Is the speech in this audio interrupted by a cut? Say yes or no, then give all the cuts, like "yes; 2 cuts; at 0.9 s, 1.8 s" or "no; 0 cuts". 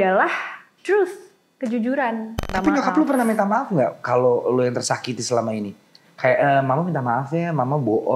yes; 1 cut; at 2.4 s